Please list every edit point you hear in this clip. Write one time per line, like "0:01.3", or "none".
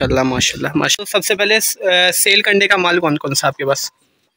0:00.9